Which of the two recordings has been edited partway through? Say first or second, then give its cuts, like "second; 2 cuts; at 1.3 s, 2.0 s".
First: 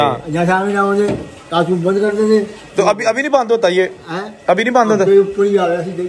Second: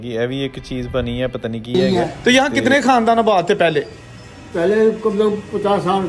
second; 1 cut; at 1.7 s